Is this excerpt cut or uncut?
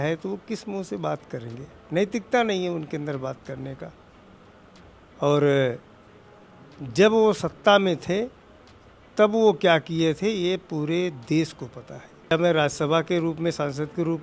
cut